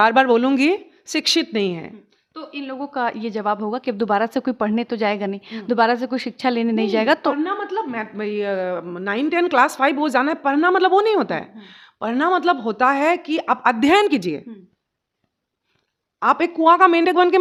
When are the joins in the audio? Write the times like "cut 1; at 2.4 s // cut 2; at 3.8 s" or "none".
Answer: none